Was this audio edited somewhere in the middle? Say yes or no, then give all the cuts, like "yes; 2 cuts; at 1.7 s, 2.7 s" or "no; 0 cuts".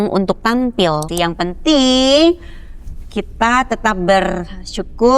yes; 1 cut; at 1.0 s